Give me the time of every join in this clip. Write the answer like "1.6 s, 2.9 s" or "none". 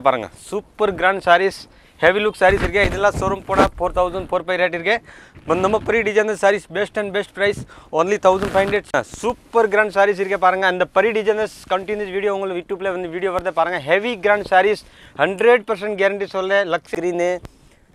8.8 s, 16.9 s

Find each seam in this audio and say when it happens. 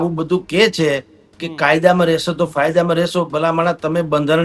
none

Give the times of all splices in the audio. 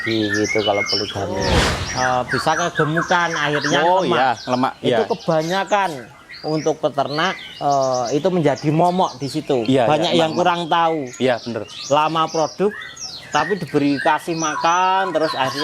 1.5 s

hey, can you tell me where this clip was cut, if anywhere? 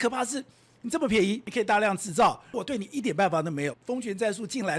1.5 s, 2.6 s, 3.8 s

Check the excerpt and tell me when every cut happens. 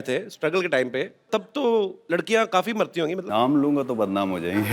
1.3 s, 2.0 s, 3.2 s

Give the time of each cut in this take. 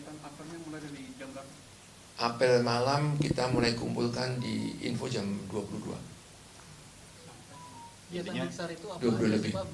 5.9 s

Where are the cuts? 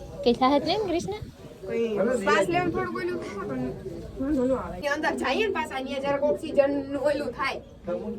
none

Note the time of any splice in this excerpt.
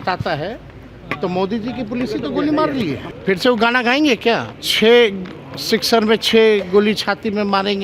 3.1 s, 4.6 s

